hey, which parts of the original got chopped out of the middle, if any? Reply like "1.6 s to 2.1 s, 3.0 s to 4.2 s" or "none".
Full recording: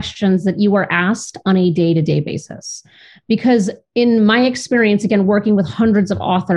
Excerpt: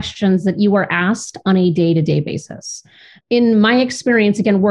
3.1 s to 3.8 s